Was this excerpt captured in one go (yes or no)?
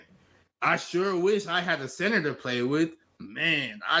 yes